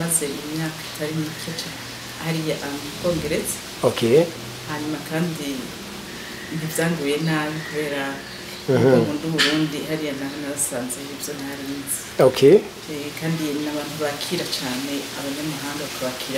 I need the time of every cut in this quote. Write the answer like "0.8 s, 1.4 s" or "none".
none